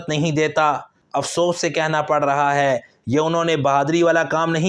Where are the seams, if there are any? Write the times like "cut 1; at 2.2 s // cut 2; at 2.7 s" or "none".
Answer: cut 1; at 1.0 s